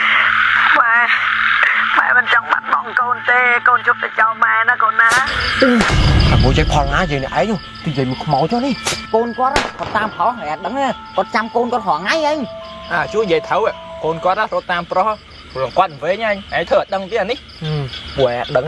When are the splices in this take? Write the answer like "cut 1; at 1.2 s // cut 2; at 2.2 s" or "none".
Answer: cut 1; at 5.4 s // cut 2; at 8.9 s